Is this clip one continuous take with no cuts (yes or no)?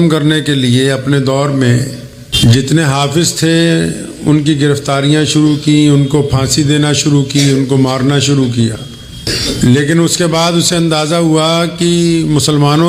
no